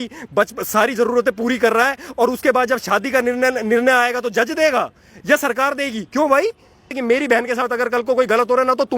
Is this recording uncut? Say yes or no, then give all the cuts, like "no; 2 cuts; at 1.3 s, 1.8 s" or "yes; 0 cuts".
no; 1 cut; at 6.9 s